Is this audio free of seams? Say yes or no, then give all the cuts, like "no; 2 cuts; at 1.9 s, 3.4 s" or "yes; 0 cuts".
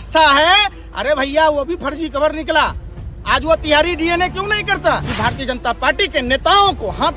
no; 1 cut; at 5.1 s